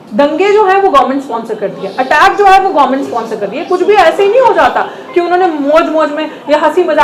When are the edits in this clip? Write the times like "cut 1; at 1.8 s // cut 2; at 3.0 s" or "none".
none